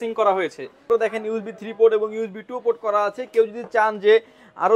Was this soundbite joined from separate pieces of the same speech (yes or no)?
yes